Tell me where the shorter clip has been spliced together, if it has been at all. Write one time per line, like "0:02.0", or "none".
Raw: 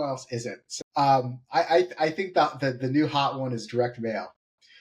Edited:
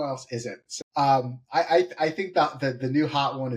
none